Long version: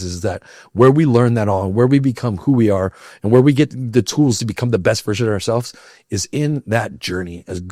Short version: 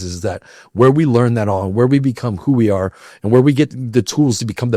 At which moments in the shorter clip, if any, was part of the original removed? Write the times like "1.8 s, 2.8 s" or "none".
none